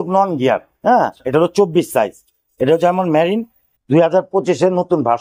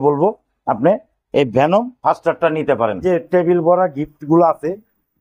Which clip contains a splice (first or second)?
second